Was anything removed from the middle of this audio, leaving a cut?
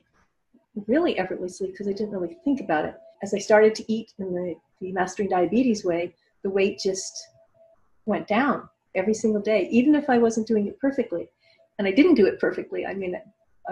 yes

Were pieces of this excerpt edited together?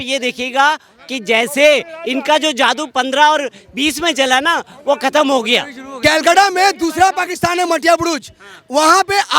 yes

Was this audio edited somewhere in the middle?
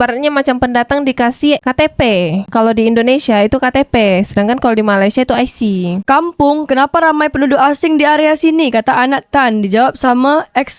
no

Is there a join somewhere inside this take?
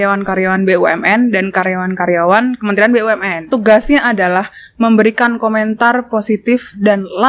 yes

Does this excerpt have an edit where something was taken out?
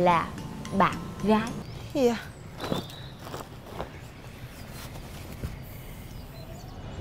yes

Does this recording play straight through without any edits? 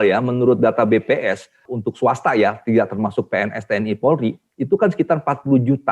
no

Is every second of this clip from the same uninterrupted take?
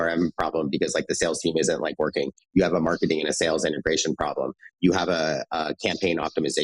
yes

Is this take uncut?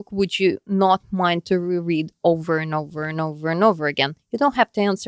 yes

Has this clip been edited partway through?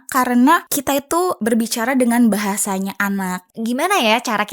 yes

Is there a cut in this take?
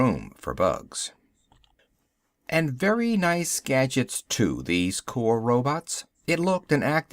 yes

